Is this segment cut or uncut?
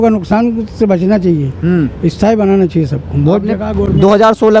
uncut